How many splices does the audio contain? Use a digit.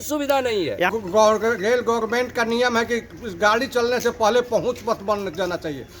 1